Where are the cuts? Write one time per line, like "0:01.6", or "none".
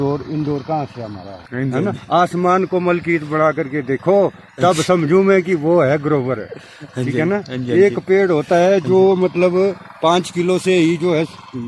0:01.4